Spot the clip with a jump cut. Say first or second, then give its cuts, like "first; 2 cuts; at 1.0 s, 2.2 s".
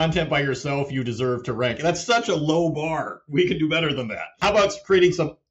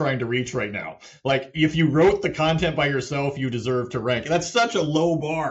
first; 1 cut; at 4.4 s